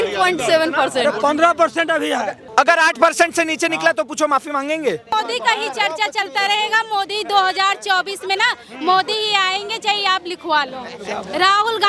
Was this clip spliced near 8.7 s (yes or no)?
no